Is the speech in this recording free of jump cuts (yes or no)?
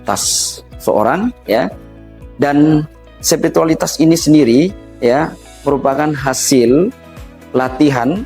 yes